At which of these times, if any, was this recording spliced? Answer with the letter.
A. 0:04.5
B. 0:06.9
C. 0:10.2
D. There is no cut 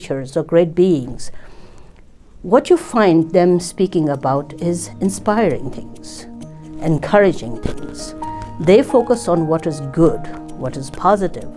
D